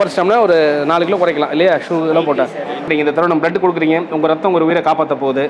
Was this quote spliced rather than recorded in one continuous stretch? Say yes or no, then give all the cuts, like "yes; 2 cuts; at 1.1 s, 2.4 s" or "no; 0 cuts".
yes; 1 cut; at 2.8 s